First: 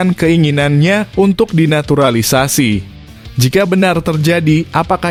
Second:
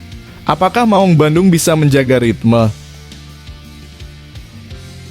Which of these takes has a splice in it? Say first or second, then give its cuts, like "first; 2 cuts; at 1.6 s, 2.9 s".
second; 1 cut; at 3.3 s